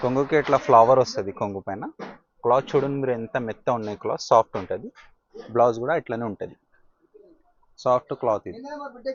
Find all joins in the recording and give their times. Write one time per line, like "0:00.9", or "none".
none

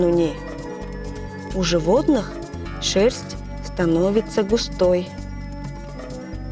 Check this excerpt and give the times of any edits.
none

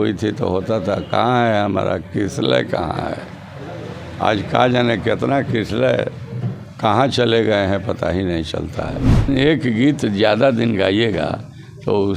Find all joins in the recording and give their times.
0:09.3

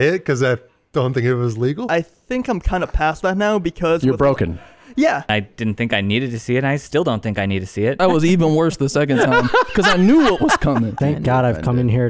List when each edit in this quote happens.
0:01.9
0:05.3
0:08.0
0:11.0

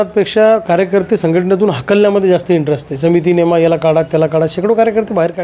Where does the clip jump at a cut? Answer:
none

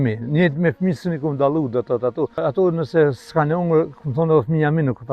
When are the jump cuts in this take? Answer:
0:02.4

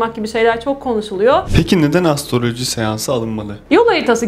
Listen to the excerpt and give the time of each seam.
0:01.5

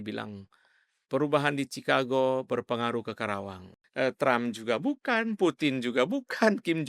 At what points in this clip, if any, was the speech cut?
0:03.8

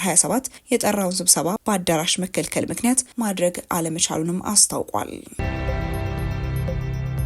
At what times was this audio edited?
0:05.3

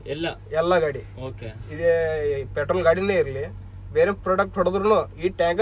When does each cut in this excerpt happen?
none

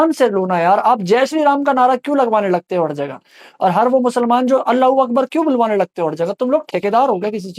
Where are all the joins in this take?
none

